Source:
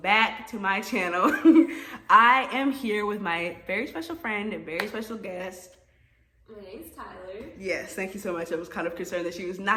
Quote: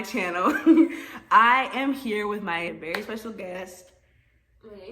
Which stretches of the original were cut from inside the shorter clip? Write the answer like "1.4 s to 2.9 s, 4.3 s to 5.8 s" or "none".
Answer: 3.5 s to 4.5 s

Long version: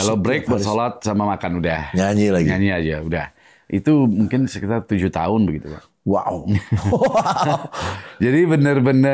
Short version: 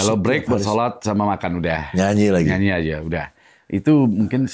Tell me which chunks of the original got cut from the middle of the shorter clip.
none

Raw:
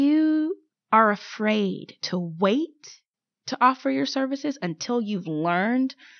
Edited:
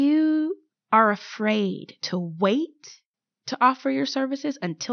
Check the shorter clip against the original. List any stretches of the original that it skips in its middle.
none

